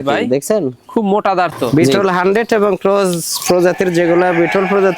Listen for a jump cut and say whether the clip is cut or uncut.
cut